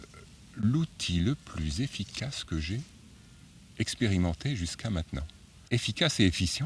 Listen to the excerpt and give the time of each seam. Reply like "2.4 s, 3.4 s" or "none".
5.6 s

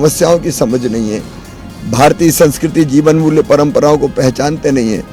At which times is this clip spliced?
none

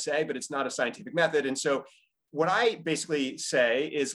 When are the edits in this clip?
none

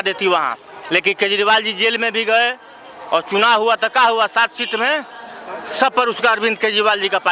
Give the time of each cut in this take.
none

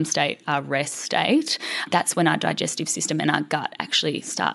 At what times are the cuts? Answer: 1.9 s

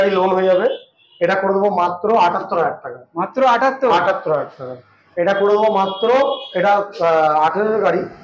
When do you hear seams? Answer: 5.0 s

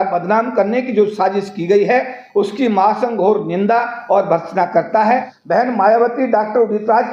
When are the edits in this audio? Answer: 5.3 s

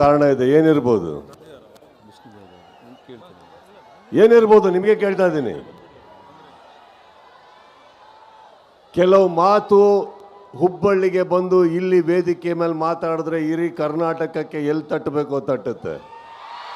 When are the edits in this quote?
none

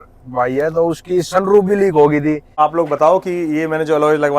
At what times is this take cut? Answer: 2.5 s

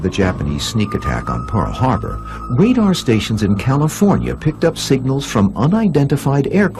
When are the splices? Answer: none

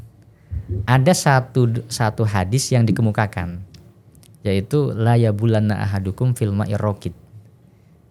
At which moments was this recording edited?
none

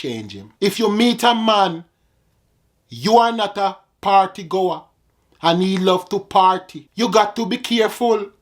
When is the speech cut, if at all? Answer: 6.8 s

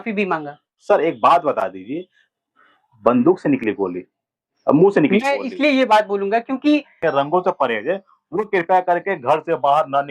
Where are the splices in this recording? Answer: 6.9 s

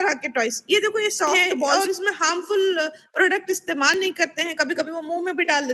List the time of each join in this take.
1.7 s

